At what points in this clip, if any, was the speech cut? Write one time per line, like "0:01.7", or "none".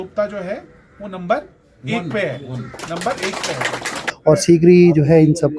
0:04.0